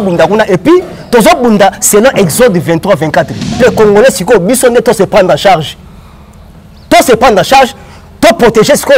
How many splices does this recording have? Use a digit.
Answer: 1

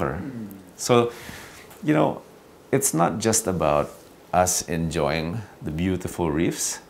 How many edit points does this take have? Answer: 0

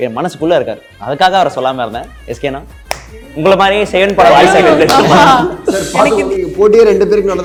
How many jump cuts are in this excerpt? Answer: 0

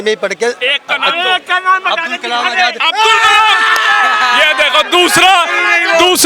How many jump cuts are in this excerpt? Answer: 0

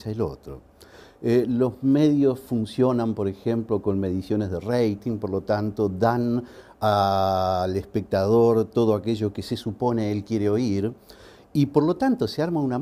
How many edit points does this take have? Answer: 0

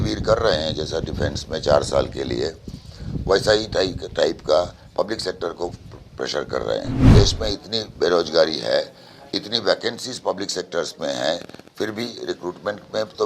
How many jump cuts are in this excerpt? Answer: 1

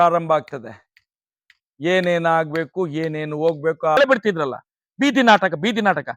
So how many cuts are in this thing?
1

